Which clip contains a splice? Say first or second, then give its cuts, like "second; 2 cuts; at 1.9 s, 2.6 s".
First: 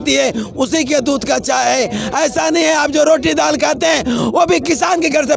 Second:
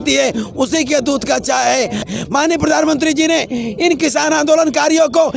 second; 1 cut; at 2.1 s